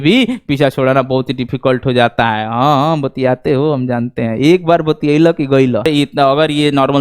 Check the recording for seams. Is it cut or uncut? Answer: cut